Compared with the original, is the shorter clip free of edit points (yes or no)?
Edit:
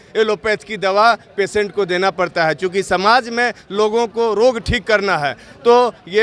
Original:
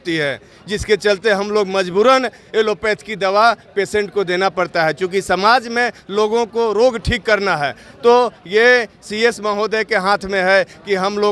yes